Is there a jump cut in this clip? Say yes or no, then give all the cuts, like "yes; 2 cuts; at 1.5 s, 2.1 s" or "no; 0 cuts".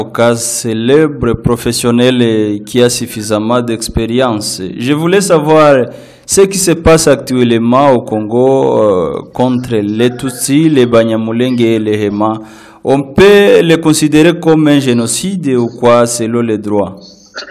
no; 0 cuts